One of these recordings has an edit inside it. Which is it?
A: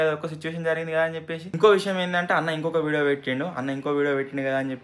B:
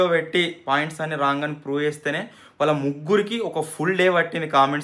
A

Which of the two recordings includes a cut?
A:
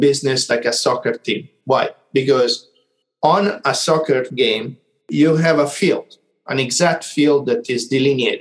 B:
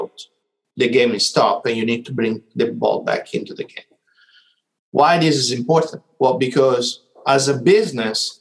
A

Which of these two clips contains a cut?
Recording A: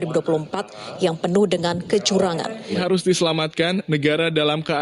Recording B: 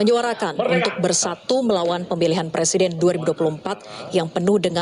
A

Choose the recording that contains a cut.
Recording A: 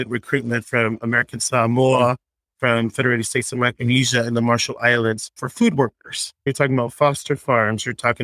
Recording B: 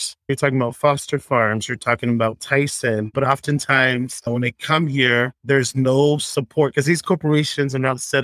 B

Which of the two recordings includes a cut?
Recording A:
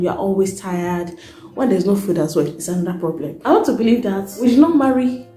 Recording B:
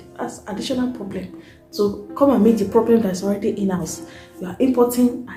A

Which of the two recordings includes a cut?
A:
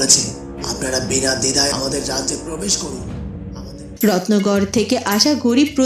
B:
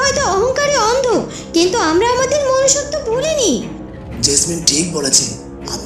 A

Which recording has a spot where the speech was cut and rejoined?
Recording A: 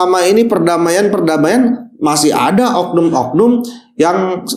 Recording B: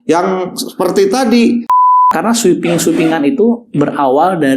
B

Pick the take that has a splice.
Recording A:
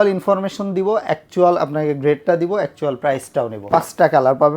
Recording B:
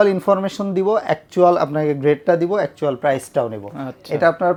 A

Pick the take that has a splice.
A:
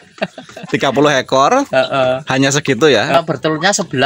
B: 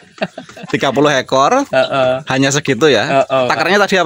A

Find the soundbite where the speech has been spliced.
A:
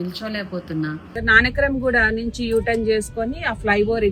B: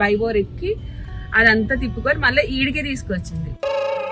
A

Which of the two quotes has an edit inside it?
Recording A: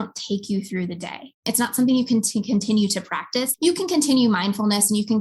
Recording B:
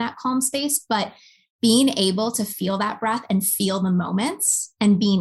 A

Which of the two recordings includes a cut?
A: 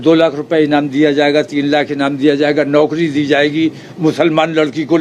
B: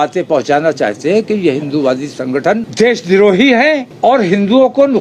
B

